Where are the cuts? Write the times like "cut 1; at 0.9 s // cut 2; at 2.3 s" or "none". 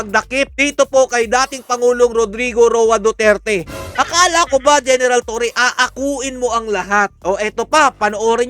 none

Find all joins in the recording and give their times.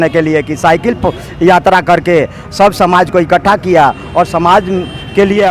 none

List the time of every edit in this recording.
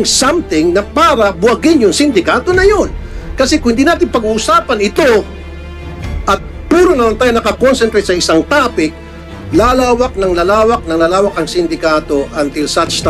none

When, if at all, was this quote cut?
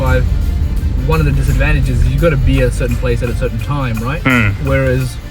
none

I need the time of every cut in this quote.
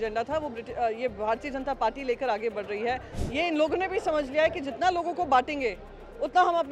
cut 1; at 3.1 s

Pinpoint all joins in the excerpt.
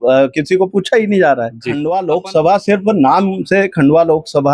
cut 1; at 1.7 s

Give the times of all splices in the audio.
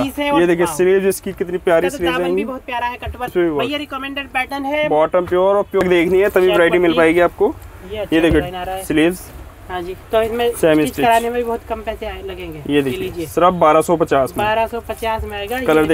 cut 1; at 3.3 s // cut 2; at 5.8 s // cut 3; at 10.0 s

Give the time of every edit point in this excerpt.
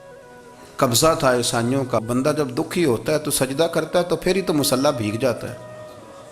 cut 1; at 2.0 s

